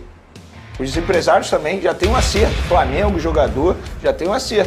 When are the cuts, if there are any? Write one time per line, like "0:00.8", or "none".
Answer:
none